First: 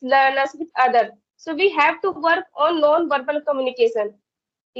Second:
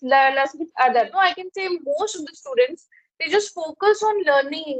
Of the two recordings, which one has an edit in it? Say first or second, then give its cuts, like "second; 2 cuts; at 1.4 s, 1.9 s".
second; 1 cut; at 0.9 s